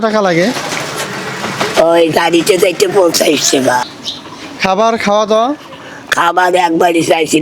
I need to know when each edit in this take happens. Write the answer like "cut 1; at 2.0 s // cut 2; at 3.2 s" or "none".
cut 1; at 4.0 s